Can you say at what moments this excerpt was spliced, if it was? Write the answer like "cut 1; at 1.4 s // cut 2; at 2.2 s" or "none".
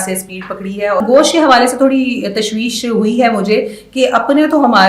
cut 1; at 1.0 s